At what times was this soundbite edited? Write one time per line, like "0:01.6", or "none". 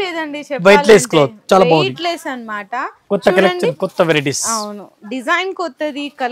none